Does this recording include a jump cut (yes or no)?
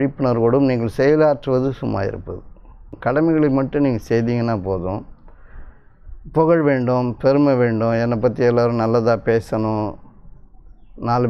yes